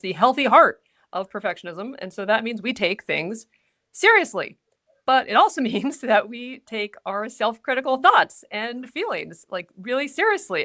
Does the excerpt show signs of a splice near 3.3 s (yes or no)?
no